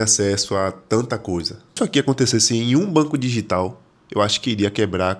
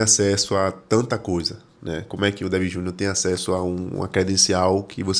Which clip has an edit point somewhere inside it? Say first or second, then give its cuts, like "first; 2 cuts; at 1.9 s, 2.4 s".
first; 1 cut; at 1.7 s